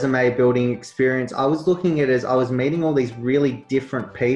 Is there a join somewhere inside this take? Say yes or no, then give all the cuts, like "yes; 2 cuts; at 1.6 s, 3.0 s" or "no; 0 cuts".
no; 0 cuts